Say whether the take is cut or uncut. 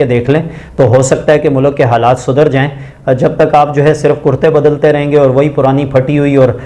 uncut